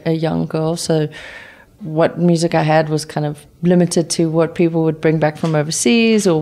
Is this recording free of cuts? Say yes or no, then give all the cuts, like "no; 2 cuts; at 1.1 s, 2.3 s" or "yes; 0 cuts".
yes; 0 cuts